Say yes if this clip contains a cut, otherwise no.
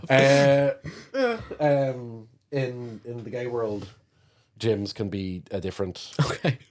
no